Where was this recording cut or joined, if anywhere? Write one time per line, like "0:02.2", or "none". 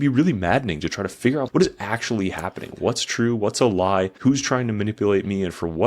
0:01.5
0:04.1